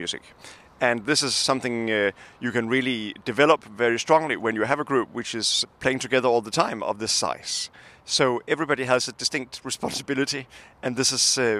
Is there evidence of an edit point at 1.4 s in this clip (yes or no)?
yes